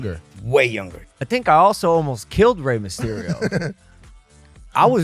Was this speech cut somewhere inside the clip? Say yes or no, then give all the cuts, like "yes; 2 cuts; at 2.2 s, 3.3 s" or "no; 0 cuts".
yes; 1 cut; at 1.1 s